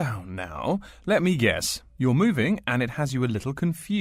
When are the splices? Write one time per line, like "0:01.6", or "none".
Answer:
none